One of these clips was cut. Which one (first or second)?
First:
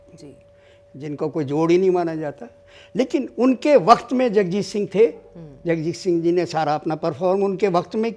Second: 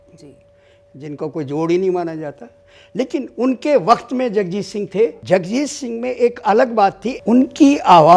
second